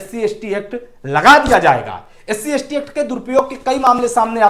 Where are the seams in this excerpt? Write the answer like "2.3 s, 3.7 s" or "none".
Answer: none